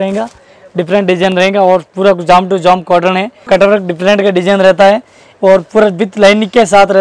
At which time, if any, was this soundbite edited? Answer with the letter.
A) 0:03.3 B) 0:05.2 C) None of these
A